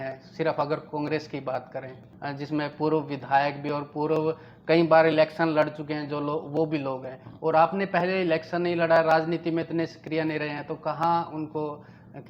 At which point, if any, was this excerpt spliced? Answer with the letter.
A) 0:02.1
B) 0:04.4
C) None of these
A